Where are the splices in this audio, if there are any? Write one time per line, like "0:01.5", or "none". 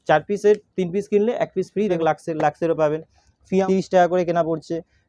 0:02.0
0:03.6